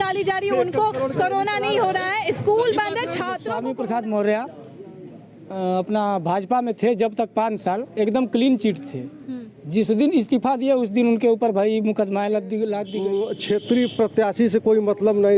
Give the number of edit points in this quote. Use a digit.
2